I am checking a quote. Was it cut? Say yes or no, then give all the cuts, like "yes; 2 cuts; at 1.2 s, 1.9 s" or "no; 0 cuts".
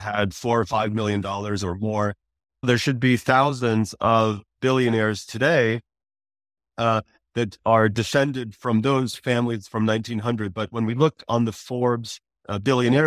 yes; 1 cut; at 2.6 s